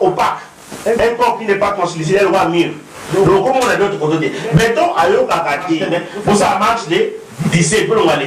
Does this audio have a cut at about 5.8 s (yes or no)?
yes